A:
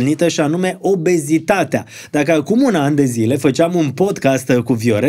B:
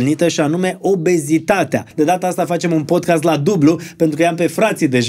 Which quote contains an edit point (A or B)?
B